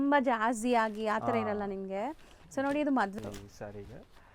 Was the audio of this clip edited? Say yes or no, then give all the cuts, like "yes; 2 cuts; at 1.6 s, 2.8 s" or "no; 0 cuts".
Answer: yes; 1 cut; at 3.1 s